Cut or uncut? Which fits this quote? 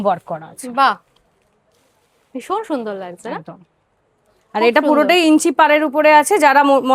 uncut